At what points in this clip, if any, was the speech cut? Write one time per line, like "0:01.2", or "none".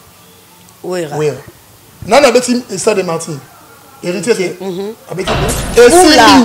0:05.5